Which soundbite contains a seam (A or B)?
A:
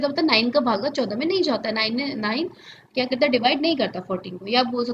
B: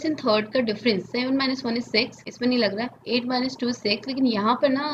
B